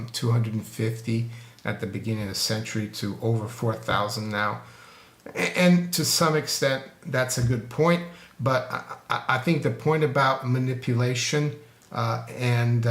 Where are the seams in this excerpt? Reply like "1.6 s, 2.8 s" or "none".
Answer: none